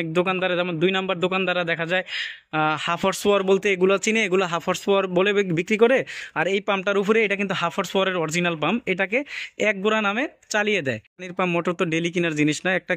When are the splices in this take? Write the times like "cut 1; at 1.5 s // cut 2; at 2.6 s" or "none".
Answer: cut 1; at 11.3 s